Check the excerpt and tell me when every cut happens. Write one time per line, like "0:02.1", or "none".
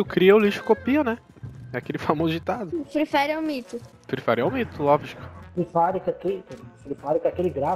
0:02.7

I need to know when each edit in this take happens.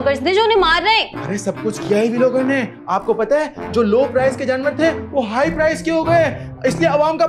none

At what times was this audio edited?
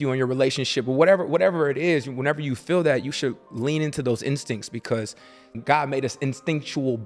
0:05.6

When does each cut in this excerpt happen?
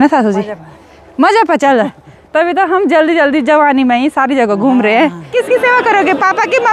0:05.3

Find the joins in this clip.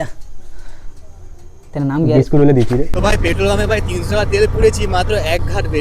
0:02.9

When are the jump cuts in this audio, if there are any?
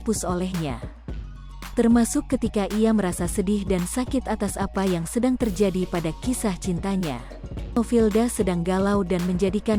0:07.8

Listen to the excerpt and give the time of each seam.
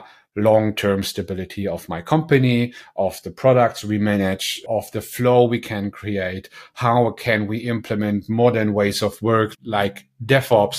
0:04.6

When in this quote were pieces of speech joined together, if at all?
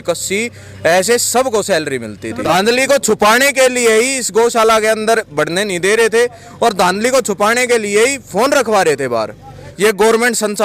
0:02.5
0:09.6

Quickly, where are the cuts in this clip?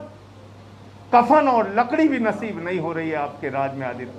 none

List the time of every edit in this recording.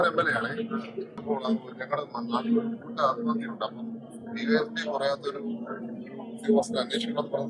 0:01.2

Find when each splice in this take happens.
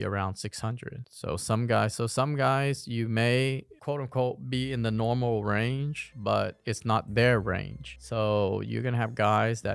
0:03.7

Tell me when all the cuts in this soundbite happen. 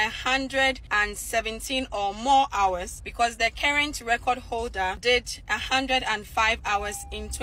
0:00.8
0:03.0
0:05.0

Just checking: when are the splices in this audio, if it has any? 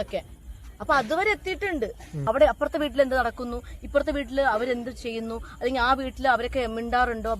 0:02.1

